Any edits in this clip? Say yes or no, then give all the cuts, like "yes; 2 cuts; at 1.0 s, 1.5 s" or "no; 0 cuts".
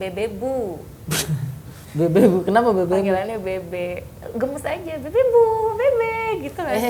no; 0 cuts